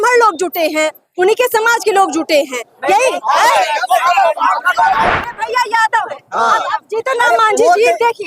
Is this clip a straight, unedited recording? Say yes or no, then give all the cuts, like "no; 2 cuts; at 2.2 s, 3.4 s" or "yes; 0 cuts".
no; 1 cut; at 5.2 s